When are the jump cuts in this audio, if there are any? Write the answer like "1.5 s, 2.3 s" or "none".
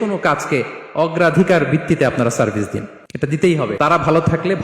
3.0 s, 3.8 s